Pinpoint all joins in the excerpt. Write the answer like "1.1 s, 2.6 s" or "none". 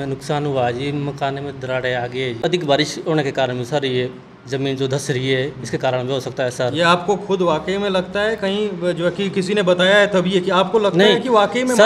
2.5 s